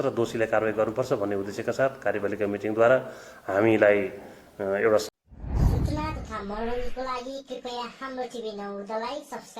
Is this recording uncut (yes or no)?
no